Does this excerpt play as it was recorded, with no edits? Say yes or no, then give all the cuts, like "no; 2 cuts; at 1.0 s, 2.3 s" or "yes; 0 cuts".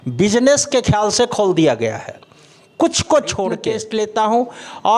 no; 1 cut; at 3.6 s